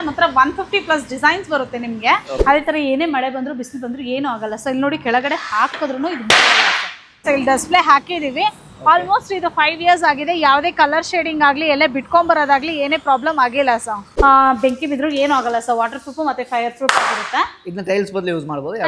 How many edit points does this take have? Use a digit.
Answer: 3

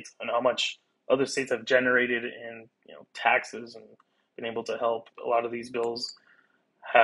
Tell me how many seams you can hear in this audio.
1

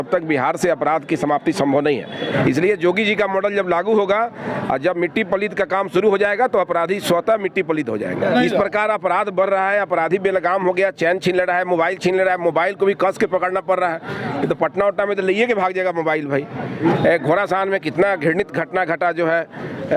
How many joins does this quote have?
3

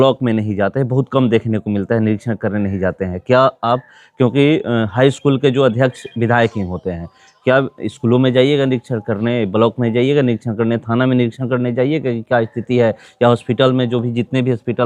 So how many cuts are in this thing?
0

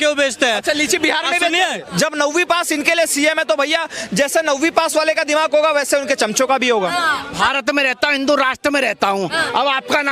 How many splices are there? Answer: 2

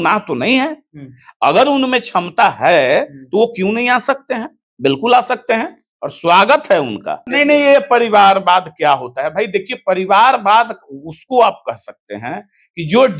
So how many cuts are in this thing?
1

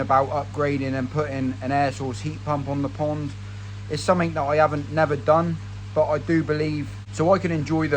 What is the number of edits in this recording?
0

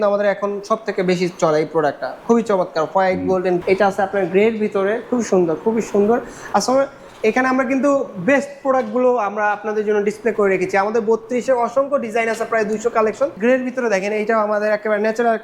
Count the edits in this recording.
2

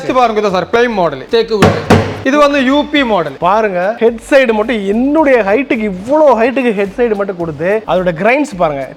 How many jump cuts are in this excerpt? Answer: 4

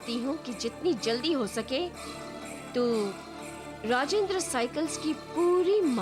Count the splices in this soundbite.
0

